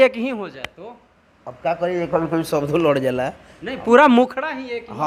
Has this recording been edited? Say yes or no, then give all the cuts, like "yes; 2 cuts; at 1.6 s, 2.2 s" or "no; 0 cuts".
no; 0 cuts